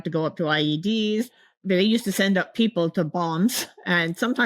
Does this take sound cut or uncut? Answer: cut